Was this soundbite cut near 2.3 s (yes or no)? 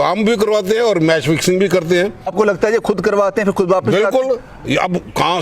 yes